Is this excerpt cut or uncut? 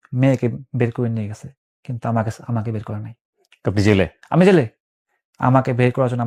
uncut